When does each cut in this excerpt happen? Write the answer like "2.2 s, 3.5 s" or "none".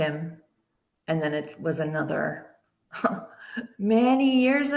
none

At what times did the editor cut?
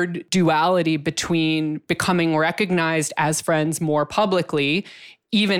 none

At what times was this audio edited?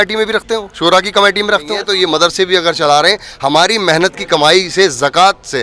1.8 s

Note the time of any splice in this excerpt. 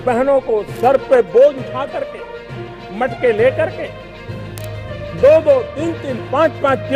none

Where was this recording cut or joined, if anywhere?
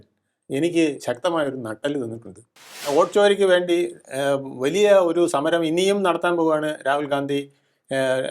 2.9 s

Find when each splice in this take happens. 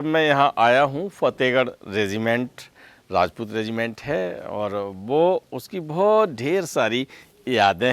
none

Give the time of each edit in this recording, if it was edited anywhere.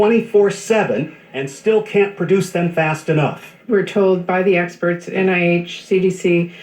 2.0 s, 3.7 s

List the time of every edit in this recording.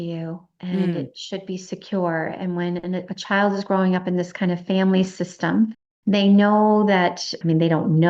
5.9 s

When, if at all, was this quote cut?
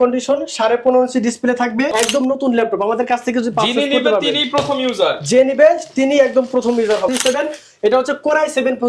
1.9 s, 7.1 s

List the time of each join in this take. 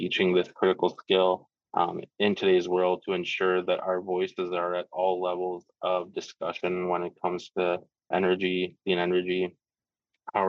none

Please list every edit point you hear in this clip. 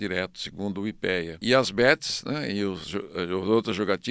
1.3 s

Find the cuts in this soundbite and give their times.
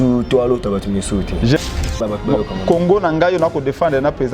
1.6 s

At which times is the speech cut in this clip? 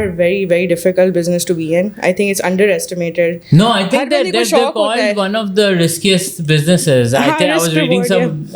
none

